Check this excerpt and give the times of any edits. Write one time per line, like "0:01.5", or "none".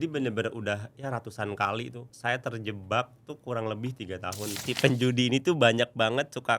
0:02.0
0:04.7

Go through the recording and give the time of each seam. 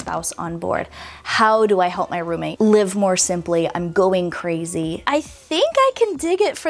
0:02.5
0:05.0

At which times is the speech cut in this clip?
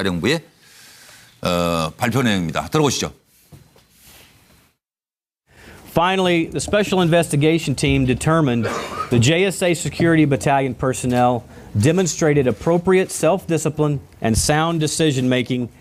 none

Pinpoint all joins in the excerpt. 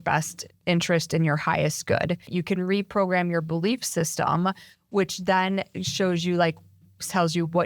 0:02.3

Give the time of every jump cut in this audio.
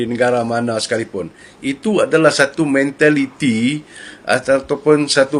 none

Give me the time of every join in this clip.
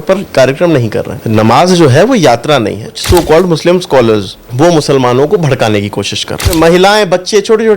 0:01.2
0:02.9
0:04.4
0:06.5

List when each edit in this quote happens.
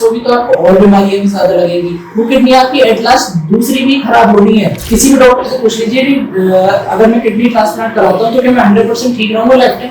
0:04.8

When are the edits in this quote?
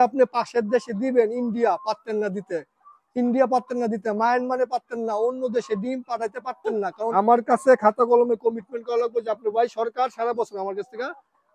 0:07.1

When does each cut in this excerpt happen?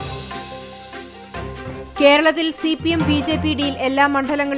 0:02.0

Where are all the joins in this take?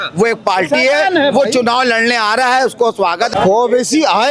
0:03.3

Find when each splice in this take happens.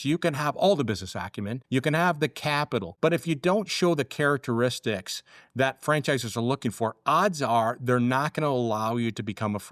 0:01.5
0:02.9

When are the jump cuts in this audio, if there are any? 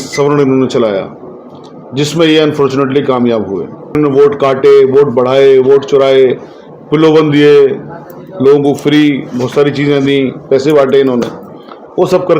0:04.0

